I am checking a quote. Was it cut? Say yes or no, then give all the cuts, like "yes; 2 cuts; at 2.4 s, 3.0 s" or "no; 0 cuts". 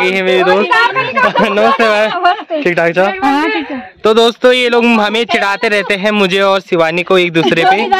no; 0 cuts